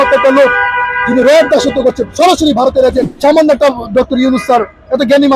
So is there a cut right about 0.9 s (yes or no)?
no